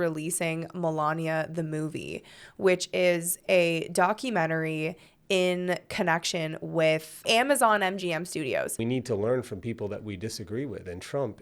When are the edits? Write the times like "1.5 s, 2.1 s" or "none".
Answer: 8.8 s